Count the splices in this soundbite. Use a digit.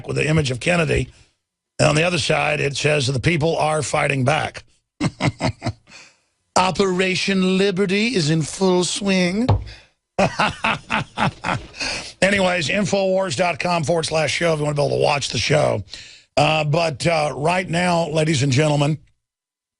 1